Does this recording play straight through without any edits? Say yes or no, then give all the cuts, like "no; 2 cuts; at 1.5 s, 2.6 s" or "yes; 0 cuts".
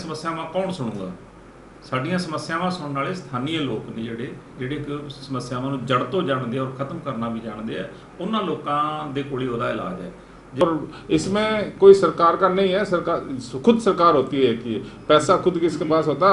no; 1 cut; at 10.6 s